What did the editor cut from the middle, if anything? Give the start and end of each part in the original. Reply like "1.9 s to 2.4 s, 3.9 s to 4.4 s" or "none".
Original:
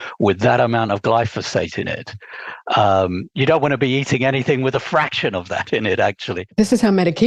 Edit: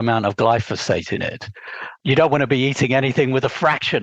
2.6 s to 3.2 s

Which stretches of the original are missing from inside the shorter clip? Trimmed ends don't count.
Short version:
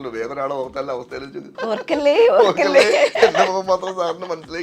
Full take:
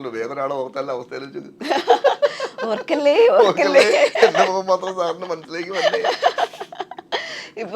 1.5 s to 2.5 s

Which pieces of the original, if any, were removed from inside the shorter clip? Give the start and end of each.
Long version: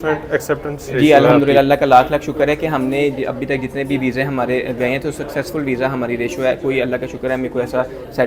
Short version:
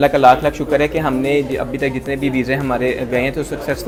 none

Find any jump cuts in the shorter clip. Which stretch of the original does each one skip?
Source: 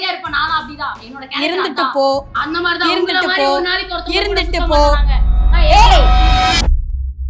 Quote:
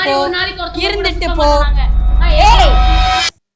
none

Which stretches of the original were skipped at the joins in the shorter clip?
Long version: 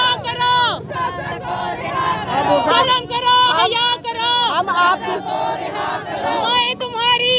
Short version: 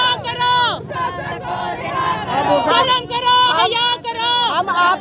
none

